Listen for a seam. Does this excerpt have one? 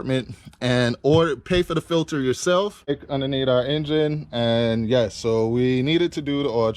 yes; 1 cut; at 3.0 s

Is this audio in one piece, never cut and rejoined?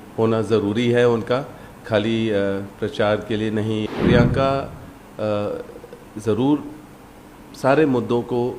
no; 1 cut; at 3.8 s

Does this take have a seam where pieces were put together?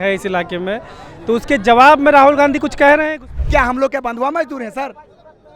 yes; 1 cut; at 3.1 s

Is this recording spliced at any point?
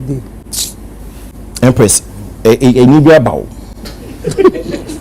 yes; 1 cut; at 1.3 s

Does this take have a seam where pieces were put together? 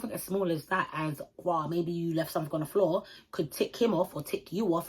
no; 0 cuts

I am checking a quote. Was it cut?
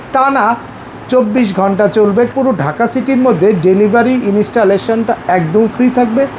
yes; 1 cut; at 2.3 s

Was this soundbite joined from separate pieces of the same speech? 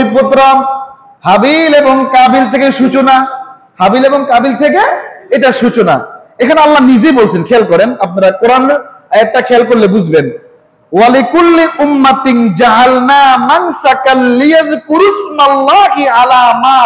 no; 0 cuts

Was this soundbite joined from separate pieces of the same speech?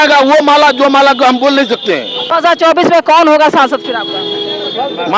yes; 1 cut; at 2.3 s

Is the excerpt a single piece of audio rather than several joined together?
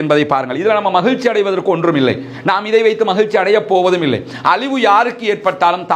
yes; 0 cuts

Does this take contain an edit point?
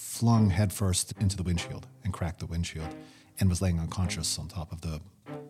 no; 0 cuts

